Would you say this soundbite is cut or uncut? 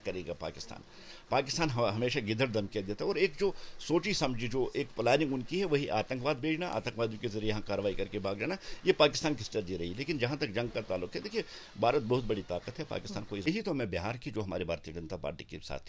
cut